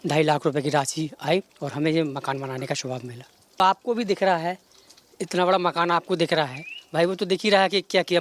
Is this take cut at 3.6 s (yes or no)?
yes